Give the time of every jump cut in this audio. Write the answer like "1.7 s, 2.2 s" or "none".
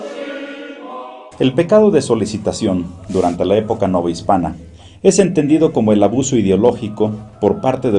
2.4 s